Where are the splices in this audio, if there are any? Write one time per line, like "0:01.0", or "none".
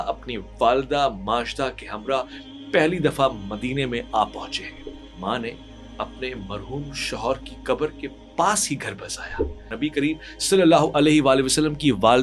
0:09.6